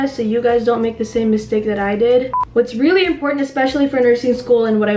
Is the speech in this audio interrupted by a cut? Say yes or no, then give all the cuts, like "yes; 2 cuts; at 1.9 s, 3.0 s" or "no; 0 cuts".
yes; 1 cut; at 2.4 s